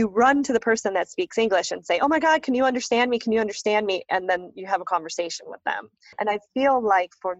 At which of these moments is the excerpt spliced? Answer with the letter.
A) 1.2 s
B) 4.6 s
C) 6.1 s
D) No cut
C